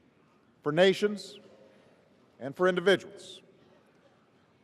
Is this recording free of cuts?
no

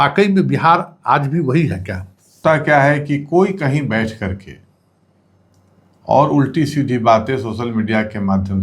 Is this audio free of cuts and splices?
no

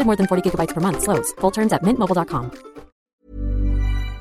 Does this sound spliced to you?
yes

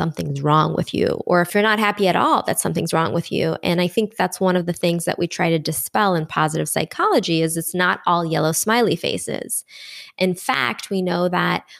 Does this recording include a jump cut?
yes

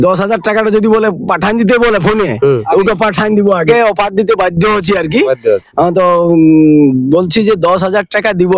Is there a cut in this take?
yes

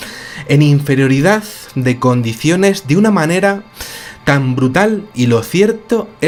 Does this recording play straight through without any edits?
yes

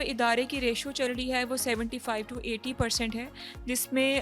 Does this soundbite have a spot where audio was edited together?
no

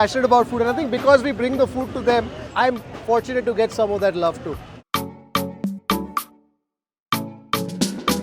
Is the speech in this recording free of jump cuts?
yes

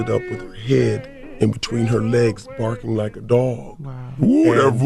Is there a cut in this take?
no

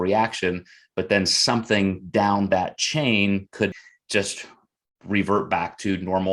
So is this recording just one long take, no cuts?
no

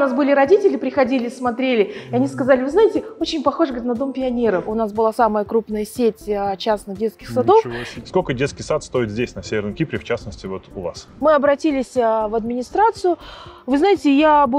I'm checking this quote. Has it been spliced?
yes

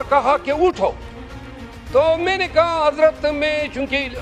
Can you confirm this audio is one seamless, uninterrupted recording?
yes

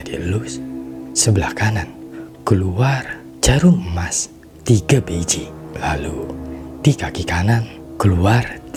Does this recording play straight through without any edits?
yes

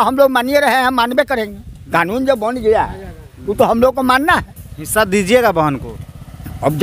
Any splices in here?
no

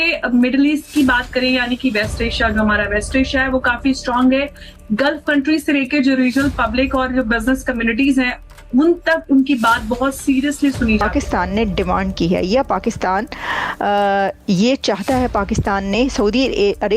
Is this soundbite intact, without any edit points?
no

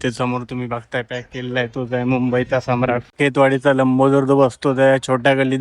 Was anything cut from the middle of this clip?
yes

